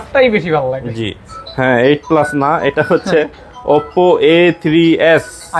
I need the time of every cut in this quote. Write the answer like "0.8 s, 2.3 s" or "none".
1.4 s